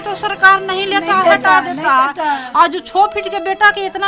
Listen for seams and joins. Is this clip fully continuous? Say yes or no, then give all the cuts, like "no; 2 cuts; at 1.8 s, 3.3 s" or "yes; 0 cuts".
yes; 0 cuts